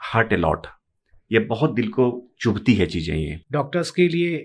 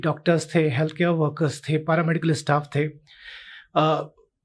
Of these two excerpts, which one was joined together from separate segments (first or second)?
first